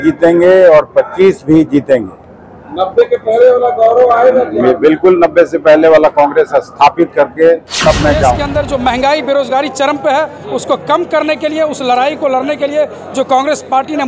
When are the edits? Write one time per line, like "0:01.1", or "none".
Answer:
0:08.4